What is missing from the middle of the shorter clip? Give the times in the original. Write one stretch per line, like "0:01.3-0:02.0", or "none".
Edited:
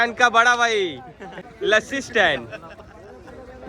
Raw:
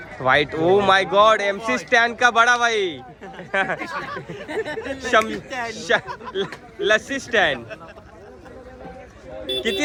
0:03.4-0:06.6